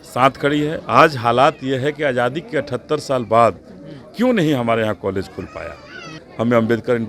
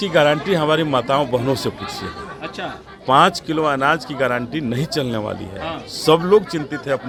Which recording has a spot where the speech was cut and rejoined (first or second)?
first